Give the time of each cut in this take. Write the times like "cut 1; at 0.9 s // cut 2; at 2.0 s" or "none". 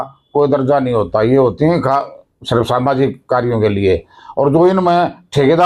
none